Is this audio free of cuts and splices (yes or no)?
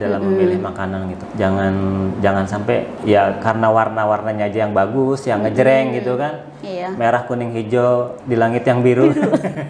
no